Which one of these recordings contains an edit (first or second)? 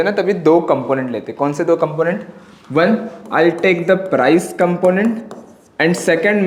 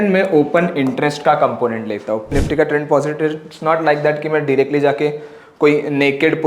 second